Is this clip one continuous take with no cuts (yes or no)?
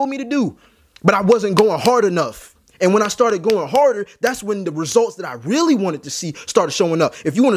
yes